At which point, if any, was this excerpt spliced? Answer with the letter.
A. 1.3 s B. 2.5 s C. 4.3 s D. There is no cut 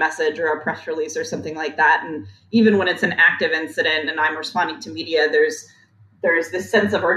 D